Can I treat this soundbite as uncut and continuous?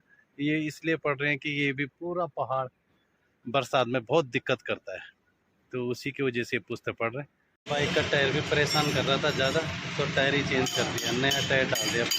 no; 1 cut; at 7.6 s

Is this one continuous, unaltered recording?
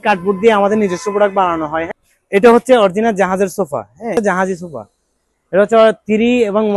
no; 2 cuts; at 1.9 s, 4.2 s

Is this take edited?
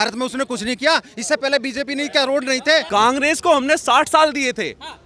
yes; 1 cut; at 2.9 s

